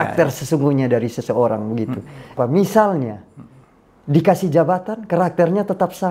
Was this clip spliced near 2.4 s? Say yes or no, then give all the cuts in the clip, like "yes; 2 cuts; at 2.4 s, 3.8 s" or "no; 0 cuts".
yes; 1 cut; at 2.4 s